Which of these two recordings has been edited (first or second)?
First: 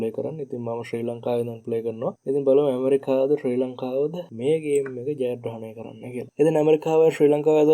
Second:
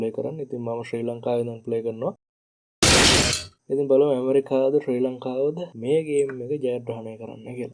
first